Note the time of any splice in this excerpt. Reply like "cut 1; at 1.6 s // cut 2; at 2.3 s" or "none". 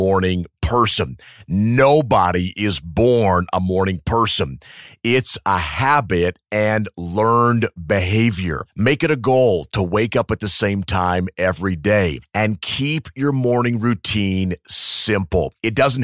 none